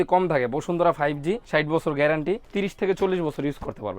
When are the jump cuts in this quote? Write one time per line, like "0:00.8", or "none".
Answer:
0:01.4
0:02.5

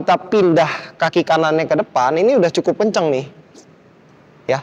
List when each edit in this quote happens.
none

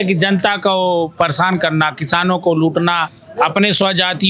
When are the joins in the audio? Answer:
0:03.2

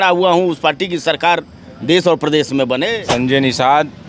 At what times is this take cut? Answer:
0:02.9

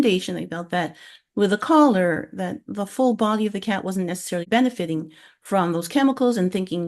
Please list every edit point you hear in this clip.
0:04.4

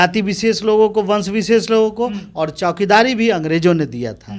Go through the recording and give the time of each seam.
none

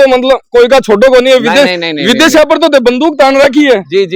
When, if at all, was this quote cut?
none

